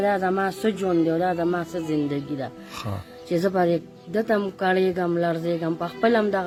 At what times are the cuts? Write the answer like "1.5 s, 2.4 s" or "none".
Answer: none